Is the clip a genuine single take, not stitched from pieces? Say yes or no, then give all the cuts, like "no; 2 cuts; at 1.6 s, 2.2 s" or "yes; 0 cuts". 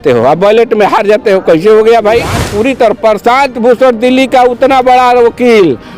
no; 1 cut; at 2.4 s